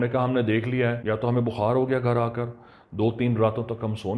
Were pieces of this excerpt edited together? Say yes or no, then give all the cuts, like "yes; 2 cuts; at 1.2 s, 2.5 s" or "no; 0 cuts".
yes; 1 cut; at 1.0 s